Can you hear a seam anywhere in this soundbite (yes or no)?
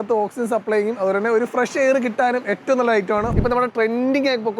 yes